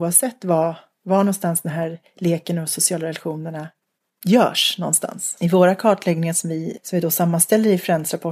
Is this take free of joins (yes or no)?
no